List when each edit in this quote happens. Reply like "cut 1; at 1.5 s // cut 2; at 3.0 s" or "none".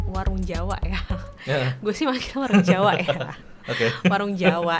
none